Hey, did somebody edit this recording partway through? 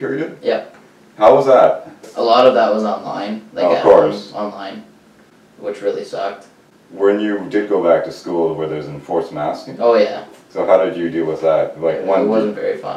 yes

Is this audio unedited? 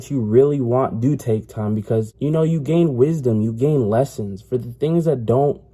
no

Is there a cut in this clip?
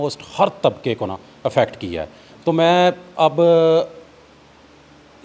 no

